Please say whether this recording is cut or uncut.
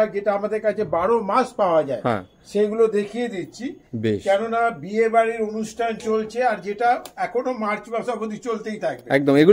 uncut